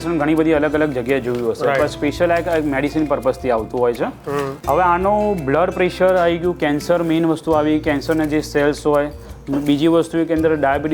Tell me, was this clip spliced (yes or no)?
yes